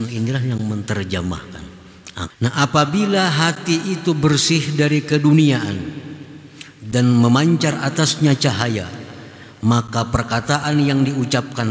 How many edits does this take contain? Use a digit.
1